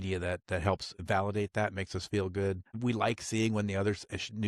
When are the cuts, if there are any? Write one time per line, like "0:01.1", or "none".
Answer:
0:00.9
0:02.7